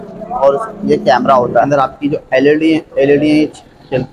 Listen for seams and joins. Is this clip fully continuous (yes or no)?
no